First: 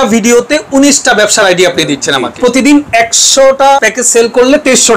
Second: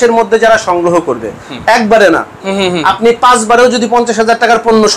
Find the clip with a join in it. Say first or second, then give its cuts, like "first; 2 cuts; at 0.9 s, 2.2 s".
first; 2 cuts; at 2.3 s, 3.8 s